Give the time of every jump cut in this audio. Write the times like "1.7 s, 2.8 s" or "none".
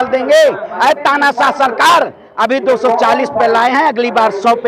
none